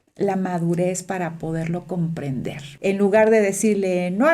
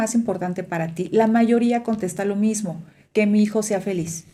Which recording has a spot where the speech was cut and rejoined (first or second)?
first